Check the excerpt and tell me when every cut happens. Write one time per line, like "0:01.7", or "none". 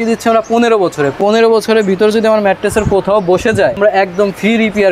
0:01.2
0:03.8